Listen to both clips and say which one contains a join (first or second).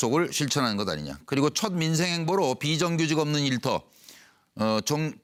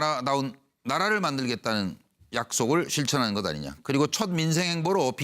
second